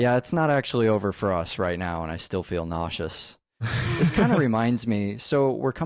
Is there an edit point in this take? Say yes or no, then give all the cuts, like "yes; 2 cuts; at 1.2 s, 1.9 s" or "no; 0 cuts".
no; 0 cuts